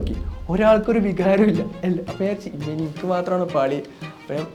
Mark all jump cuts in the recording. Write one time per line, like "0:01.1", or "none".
none

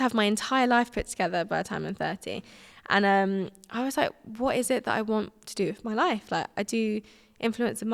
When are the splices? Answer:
none

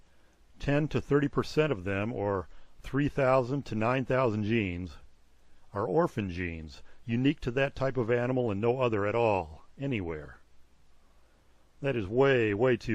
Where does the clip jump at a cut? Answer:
0:04.0

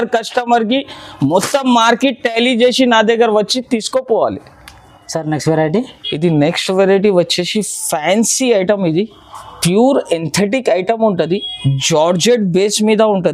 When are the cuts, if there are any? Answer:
none

